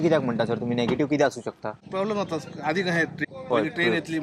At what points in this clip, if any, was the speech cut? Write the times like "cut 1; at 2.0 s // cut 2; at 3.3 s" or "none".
cut 1; at 1.8 s // cut 2; at 3.2 s